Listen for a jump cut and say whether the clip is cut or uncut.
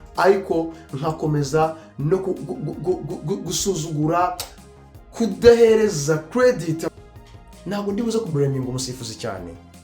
cut